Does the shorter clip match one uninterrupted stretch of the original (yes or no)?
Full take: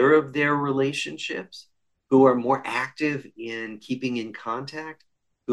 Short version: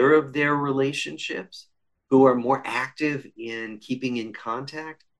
yes